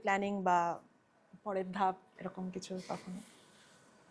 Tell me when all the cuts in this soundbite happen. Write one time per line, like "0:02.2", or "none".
none